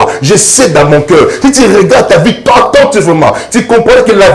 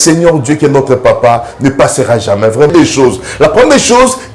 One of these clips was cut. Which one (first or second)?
second